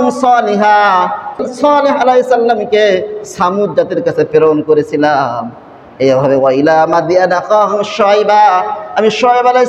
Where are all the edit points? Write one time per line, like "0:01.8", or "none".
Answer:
0:01.4

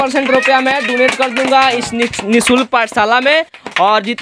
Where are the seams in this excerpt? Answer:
none

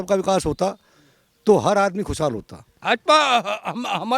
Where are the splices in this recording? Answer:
0:02.8

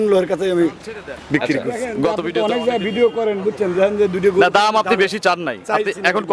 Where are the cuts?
0:02.2

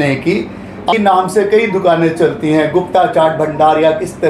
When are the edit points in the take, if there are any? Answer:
0:00.9

